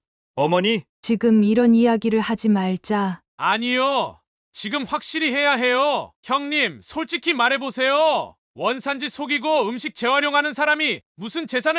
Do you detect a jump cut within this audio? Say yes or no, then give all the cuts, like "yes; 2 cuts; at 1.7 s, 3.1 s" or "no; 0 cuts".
yes; 2 cuts; at 0.9 s, 6.1 s